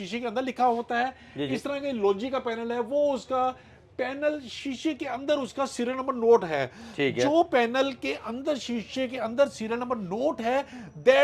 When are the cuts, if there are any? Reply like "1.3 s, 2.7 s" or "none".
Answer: none